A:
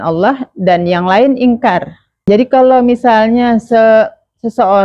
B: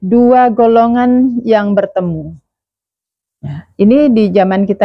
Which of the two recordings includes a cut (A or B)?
A